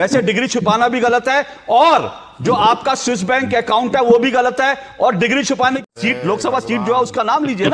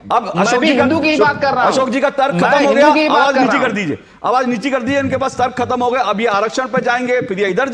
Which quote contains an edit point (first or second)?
first